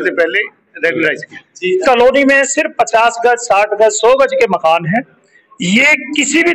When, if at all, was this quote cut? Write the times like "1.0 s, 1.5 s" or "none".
1.8 s